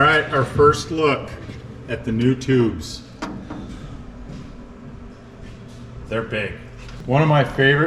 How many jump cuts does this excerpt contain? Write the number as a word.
one